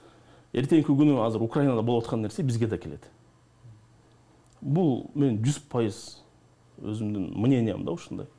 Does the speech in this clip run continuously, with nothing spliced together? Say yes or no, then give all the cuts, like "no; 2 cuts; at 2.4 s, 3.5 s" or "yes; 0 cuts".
yes; 0 cuts